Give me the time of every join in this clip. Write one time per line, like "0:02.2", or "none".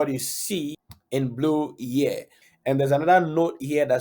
0:02.4

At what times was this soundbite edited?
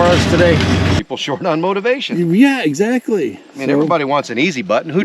0:01.0

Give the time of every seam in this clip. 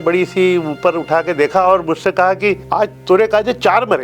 0:02.6

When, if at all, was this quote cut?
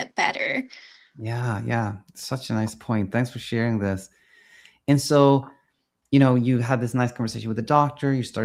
none

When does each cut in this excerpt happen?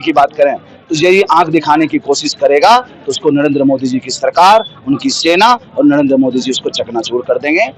none

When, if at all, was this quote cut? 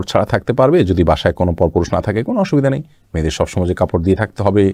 none

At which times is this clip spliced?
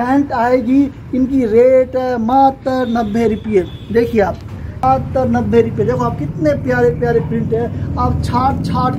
0:04.8

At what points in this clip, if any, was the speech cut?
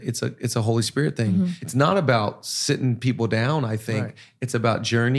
0:01.6

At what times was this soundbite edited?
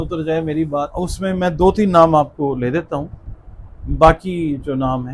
0:00.9

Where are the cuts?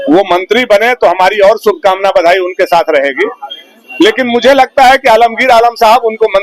none

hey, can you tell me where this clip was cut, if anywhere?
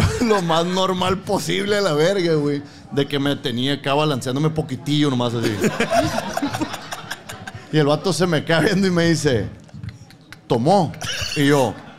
none

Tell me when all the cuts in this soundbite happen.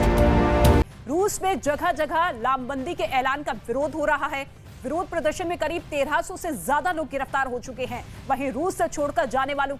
0:00.9

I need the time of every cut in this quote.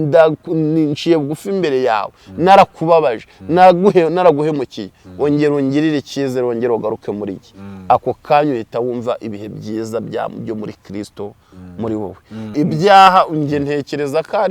0:12.5

